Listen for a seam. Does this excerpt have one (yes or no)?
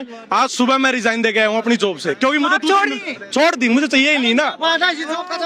no